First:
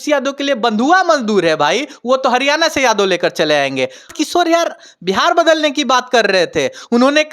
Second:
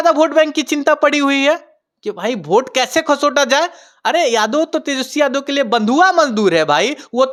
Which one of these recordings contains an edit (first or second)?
first